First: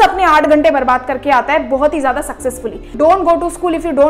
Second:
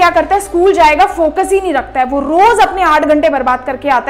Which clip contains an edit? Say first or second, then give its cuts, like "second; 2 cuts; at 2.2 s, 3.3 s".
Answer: first; 1 cut; at 2.9 s